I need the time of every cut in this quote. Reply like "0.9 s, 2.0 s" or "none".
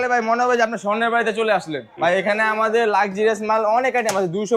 2.0 s

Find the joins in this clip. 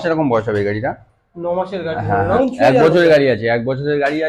2.3 s

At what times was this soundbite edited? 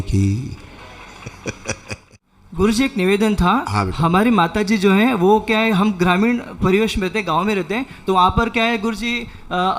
2.0 s

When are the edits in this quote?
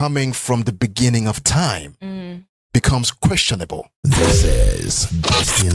3.9 s

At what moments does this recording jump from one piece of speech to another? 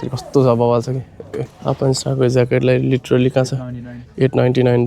1.5 s

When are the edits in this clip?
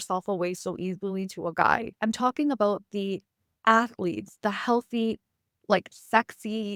none

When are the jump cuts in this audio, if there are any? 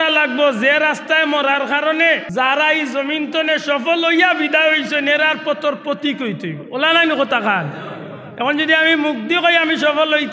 2.3 s

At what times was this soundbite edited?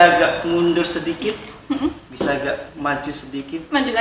2.0 s

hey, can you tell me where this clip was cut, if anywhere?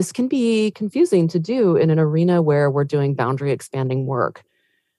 none

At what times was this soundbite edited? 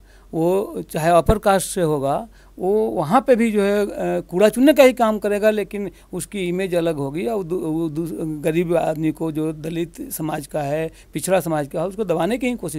none

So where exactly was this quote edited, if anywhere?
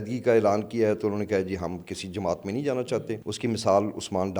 3.2 s

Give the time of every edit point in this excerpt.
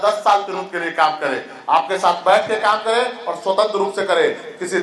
none

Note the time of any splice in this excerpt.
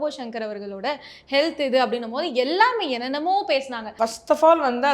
3.8 s

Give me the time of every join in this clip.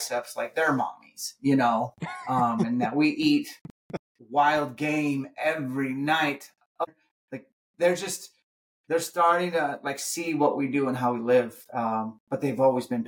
6.8 s

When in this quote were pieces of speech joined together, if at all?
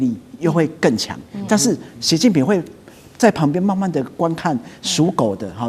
none

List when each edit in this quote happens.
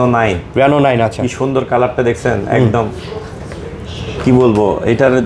none

